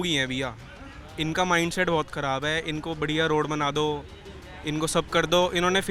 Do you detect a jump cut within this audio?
no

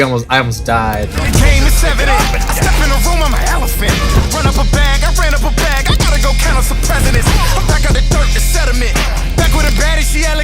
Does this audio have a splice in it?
yes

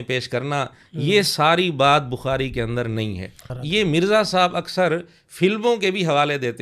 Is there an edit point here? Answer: yes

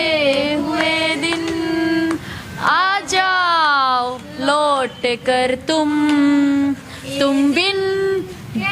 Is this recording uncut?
yes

